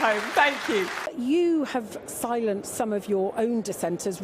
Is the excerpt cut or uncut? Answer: cut